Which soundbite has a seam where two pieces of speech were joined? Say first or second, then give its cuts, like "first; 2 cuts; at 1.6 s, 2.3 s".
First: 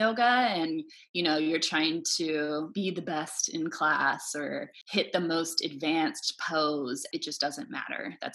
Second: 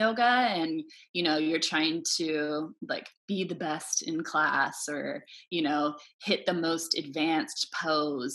first; 3 cuts; at 2.7 s, 4.8 s, 7.0 s